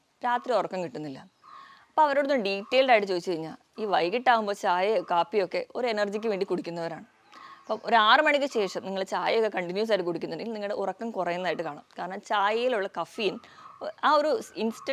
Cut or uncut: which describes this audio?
uncut